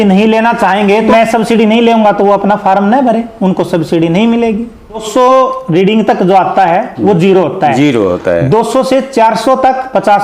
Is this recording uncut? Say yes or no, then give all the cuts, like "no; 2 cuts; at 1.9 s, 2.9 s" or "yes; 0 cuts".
no; 2 cuts; at 1.1 s, 5.0 s